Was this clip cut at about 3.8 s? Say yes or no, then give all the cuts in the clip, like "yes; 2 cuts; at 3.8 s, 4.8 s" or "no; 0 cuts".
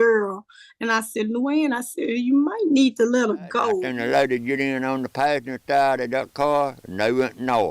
yes; 1 cut; at 3.8 s